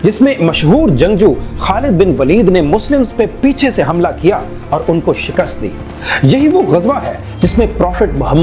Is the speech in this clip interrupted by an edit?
no; 0 cuts

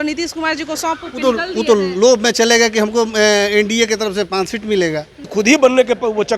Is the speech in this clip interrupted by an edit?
yes; 1 cut; at 5.2 s

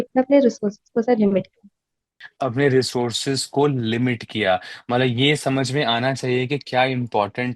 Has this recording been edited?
yes; 1 cut; at 2.2 s

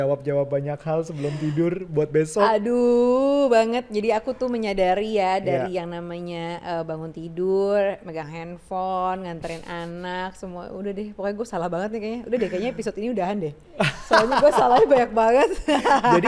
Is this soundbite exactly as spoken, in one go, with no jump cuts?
yes; 0 cuts

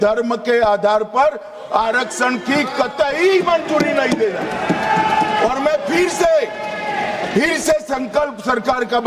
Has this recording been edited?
no; 0 cuts

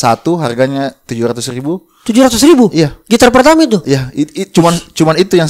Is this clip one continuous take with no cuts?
yes; 0 cuts

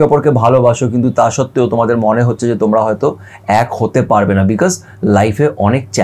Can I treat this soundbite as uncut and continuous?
yes; 0 cuts

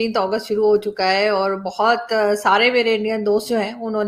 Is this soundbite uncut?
yes; 0 cuts

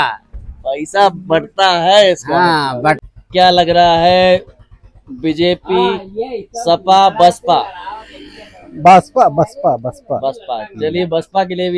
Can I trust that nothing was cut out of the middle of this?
no; 1 cut; at 3.0 s

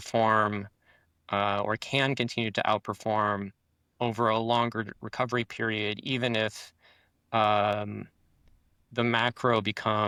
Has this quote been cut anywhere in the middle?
no; 0 cuts

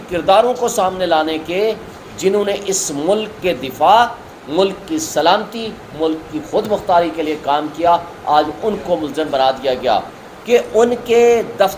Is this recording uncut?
no; 1 cut; at 10.2 s

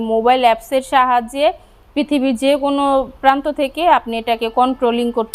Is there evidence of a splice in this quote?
no; 0 cuts

